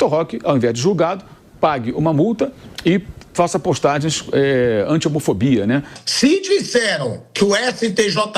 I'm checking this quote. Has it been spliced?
yes; 1 cut; at 6.0 s

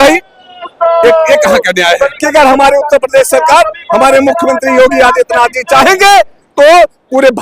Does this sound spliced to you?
yes; 1 cut; at 2.1 s

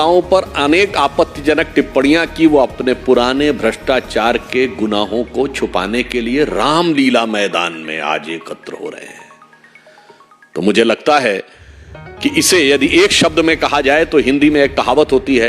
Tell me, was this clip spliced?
no; 0 cuts

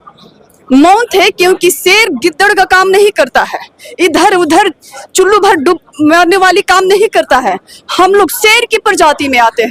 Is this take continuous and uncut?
yes; 0 cuts

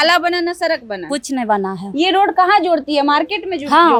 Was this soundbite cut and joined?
no; 0 cuts

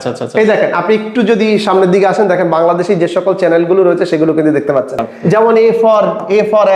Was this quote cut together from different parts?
yes; 1 cut; at 5.2 s

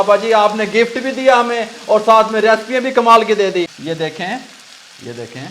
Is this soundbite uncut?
no; 1 cut; at 3.8 s

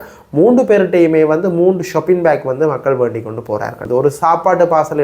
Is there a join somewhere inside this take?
yes; 1 cut; at 3.8 s

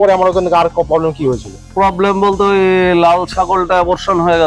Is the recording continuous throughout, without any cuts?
no; 1 cut; at 1.6 s

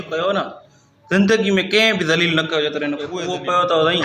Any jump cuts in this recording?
yes; 1 cut; at 3.1 s

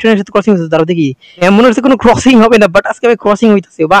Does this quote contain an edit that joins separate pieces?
yes; 1 cut; at 1.4 s

